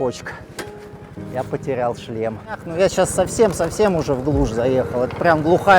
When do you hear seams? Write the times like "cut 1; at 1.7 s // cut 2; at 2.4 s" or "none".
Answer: cut 1; at 2.7 s